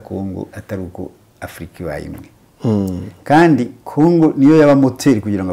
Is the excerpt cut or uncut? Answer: uncut